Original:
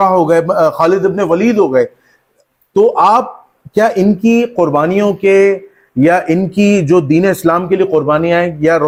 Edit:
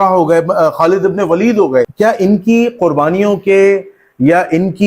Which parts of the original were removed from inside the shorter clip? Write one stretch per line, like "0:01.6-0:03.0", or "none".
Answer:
0:01.9-0:03.7